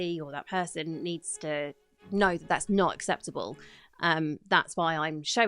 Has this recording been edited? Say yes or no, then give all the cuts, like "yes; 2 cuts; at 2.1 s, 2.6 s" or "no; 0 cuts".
no; 0 cuts